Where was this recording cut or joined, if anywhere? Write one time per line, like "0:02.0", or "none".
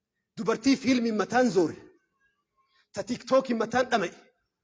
none